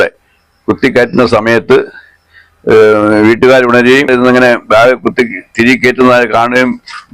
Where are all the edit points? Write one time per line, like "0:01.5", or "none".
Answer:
0:04.1

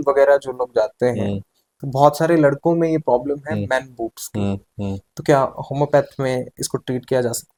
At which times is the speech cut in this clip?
none

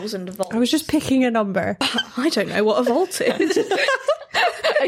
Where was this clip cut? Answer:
0:01.8

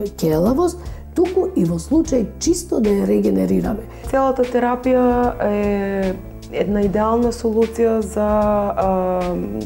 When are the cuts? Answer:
0:04.0

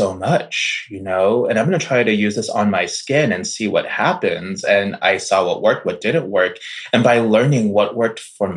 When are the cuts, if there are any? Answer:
none

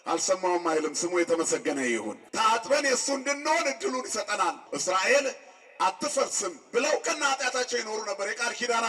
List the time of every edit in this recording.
0:02.2
0:04.7

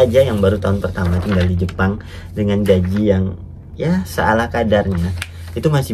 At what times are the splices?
none

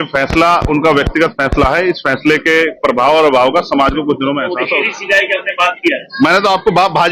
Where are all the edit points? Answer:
0:04.6

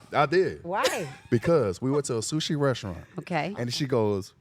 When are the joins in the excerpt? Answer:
none

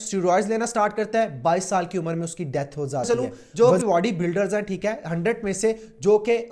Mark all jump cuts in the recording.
0:03.1

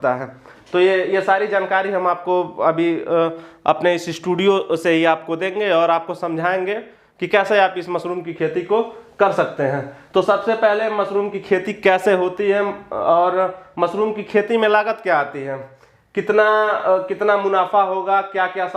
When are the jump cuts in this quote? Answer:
none

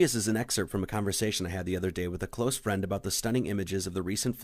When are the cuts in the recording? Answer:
0:02.3

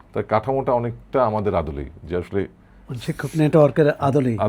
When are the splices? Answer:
none

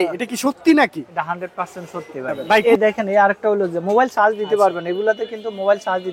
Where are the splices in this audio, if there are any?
0:02.6

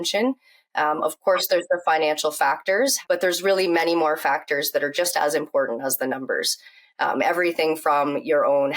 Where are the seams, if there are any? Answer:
0:03.0

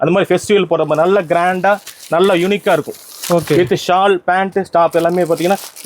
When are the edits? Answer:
none

